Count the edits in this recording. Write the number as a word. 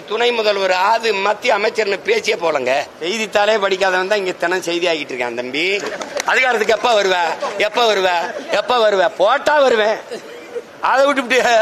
two